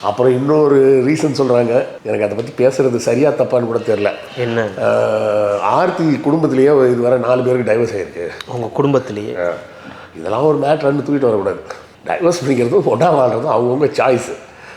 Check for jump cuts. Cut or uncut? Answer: uncut